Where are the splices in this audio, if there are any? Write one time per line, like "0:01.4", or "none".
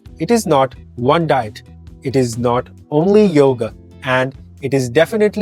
none